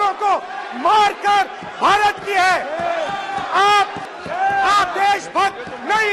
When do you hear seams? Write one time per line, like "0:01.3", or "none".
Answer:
none